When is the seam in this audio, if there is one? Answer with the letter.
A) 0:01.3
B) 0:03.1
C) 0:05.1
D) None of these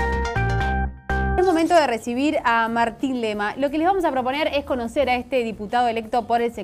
A